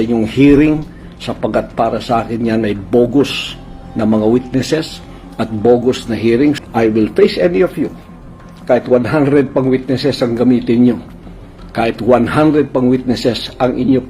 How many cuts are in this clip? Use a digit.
1